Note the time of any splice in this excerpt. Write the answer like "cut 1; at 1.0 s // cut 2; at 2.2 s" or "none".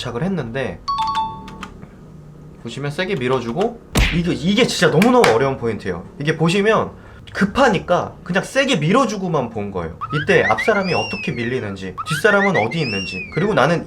cut 1; at 3.9 s